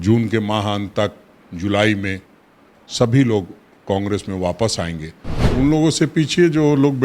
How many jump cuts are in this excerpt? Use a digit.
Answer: 1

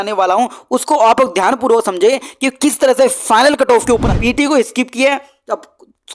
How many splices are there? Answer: 1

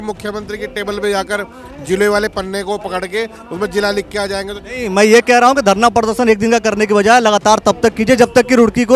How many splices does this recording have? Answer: 0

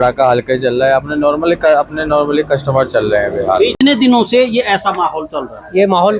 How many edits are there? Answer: 1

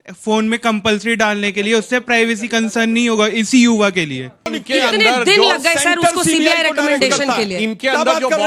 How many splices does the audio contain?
1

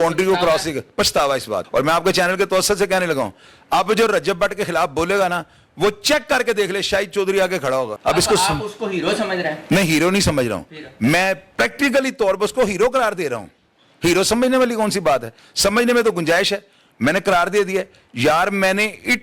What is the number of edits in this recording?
2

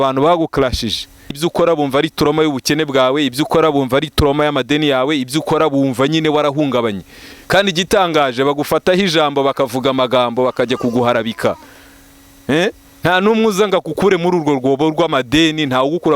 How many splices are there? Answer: 1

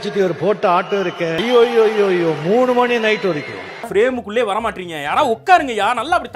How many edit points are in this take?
2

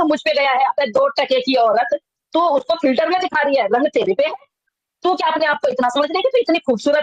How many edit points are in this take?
0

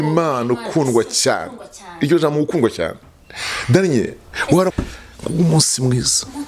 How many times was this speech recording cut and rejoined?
1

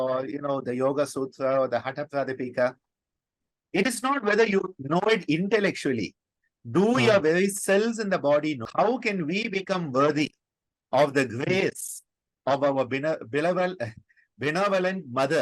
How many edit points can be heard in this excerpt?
1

